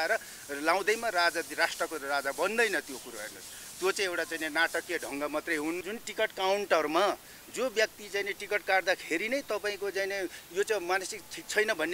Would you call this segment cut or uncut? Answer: cut